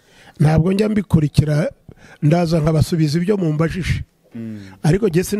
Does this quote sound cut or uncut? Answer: uncut